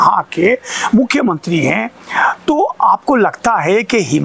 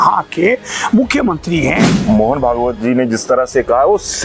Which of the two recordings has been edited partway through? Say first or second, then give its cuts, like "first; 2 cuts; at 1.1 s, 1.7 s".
second; 1 cut; at 1.9 s